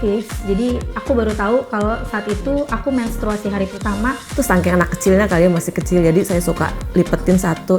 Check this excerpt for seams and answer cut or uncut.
cut